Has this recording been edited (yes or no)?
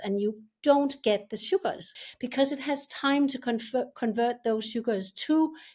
yes